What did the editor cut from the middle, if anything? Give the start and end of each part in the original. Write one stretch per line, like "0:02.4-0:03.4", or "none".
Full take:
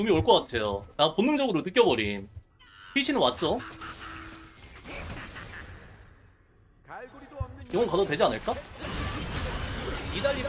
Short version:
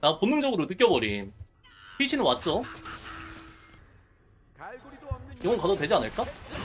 0:04.7-0:06.0